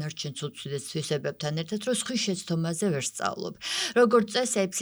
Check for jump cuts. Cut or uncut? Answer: uncut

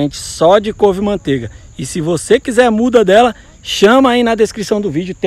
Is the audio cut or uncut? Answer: uncut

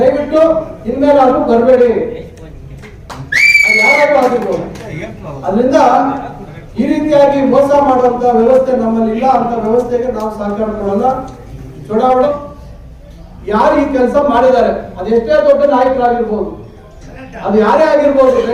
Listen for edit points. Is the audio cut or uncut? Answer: cut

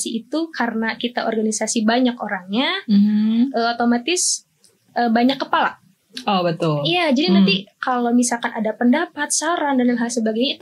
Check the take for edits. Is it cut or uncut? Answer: uncut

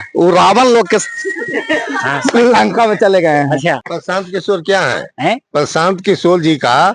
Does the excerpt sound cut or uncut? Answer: cut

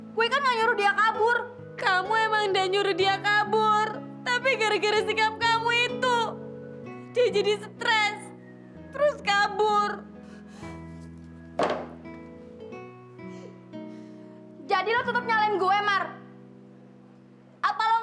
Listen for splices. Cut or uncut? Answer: cut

